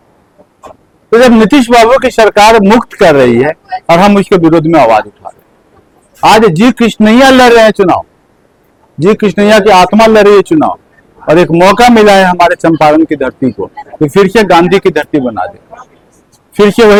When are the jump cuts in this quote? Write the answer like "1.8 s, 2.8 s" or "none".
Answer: none